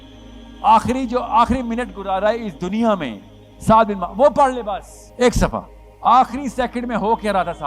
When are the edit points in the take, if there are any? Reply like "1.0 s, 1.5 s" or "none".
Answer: 5.0 s, 5.8 s